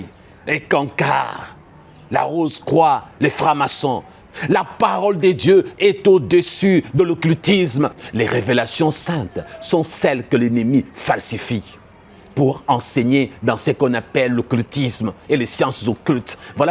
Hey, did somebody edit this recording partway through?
yes; 2 cuts; at 4.2 s, 8.0 s

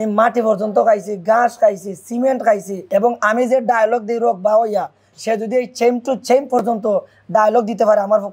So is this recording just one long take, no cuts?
no; 1 cut; at 2.7 s

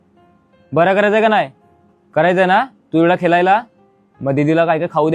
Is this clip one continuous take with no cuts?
yes; 0 cuts

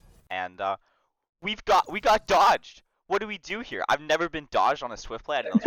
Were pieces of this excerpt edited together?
no; 0 cuts

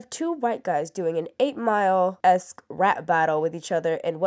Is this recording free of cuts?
yes; 0 cuts

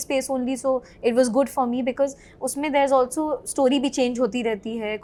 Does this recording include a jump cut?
no; 0 cuts

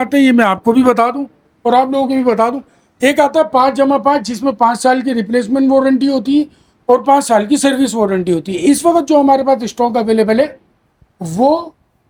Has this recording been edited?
no; 0 cuts

